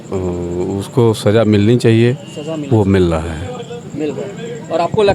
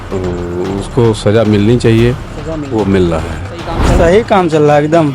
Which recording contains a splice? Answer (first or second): second